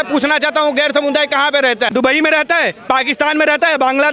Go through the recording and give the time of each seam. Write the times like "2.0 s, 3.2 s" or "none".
1.9 s